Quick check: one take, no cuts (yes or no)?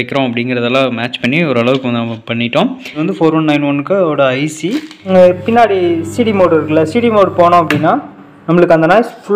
no